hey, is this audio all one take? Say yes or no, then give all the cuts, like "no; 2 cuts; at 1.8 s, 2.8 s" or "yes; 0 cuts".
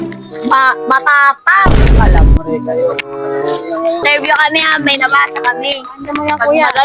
no; 1 cut; at 4.0 s